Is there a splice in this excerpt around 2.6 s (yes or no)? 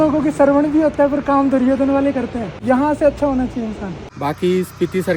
yes